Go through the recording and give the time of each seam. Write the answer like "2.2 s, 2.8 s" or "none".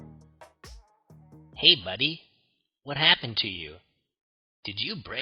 1.5 s